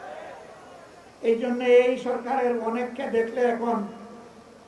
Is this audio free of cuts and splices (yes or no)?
no